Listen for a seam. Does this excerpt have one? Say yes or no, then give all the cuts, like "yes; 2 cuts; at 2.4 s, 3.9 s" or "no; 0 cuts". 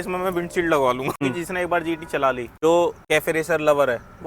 yes; 3 cuts; at 1.2 s, 2.5 s, 3.0 s